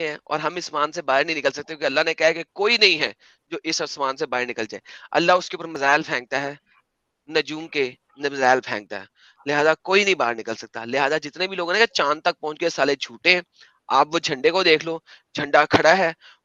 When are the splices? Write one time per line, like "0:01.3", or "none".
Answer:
none